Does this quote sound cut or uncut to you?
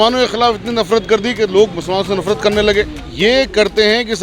cut